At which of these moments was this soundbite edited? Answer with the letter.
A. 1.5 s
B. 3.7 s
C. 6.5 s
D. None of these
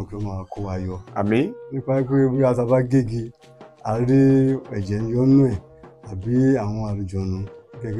A